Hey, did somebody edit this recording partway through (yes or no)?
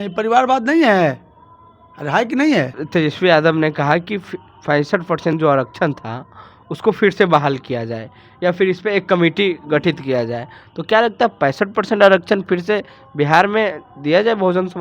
yes